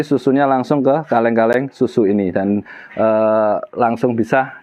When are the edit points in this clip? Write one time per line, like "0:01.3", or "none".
none